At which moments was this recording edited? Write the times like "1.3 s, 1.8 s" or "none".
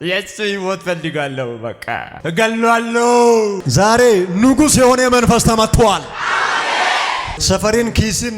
2.1 s, 3.6 s